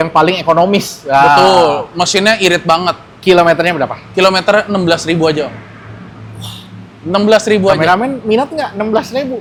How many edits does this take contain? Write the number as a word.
zero